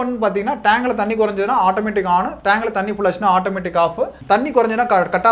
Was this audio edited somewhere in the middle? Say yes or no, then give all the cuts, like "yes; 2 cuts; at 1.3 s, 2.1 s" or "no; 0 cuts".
yes; 1 cut; at 4.2 s